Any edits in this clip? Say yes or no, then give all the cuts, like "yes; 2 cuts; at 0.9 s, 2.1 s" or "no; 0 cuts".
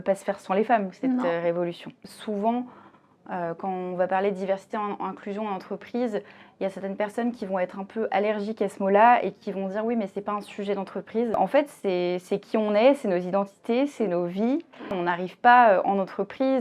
yes; 3 cuts; at 2.1 s, 11.3 s, 15.0 s